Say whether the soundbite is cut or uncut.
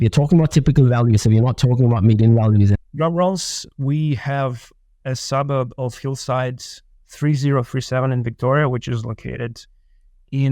cut